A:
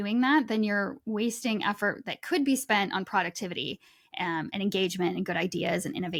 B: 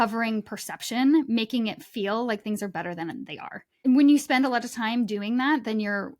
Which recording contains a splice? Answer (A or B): B